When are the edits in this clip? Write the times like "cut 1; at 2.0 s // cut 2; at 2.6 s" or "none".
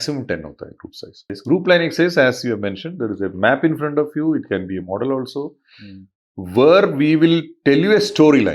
cut 1; at 1.3 s